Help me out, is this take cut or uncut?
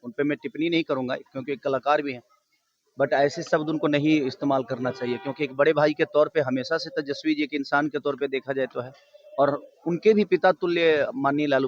uncut